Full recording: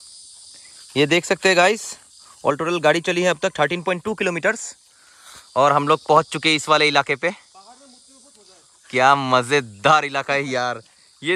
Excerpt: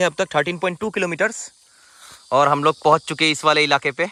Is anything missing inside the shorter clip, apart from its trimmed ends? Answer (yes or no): no